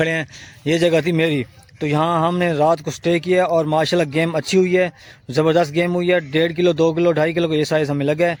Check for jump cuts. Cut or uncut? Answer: uncut